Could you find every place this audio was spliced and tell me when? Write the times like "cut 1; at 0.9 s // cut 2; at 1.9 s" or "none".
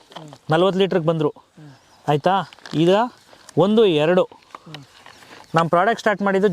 none